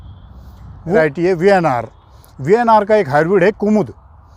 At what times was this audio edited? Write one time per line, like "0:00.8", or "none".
0:01.0